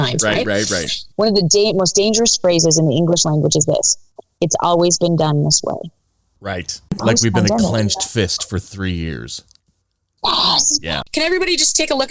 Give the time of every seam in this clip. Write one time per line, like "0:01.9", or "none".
0:01.0
0:07.0
0:11.0